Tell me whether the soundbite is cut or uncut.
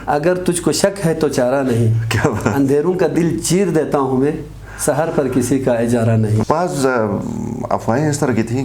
cut